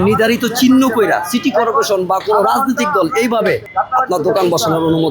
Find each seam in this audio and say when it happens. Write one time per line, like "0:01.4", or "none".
0:03.7